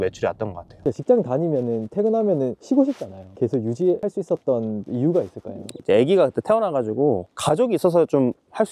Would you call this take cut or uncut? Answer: cut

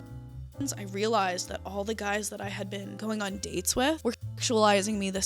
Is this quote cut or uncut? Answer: cut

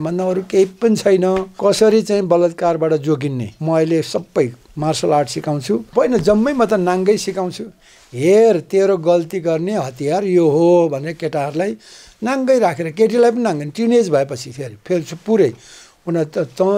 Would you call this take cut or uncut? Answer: cut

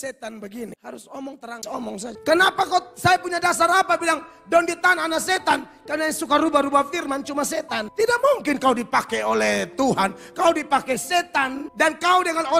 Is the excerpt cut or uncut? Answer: uncut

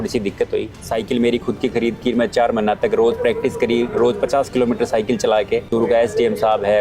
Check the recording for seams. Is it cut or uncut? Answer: cut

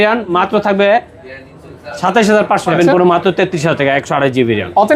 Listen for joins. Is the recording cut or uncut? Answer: cut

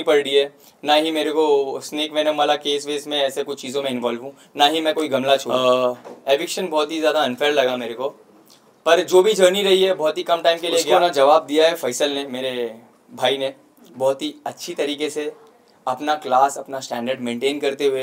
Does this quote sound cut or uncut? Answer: cut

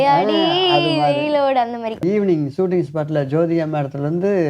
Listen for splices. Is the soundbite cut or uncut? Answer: cut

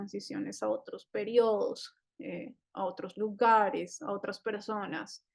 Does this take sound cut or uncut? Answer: uncut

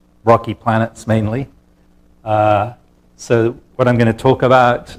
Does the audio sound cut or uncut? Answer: uncut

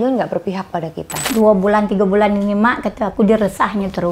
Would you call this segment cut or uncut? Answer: cut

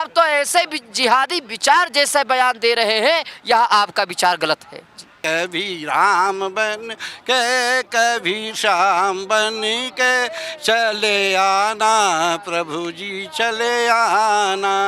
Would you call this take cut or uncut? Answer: cut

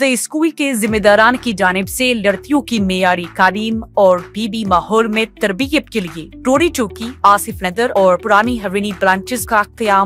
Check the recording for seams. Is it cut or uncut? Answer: uncut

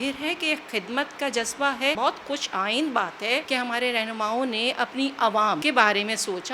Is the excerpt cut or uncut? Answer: uncut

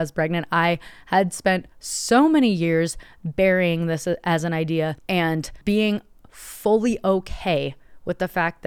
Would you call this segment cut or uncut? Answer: uncut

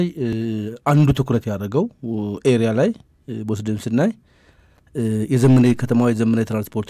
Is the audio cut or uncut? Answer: uncut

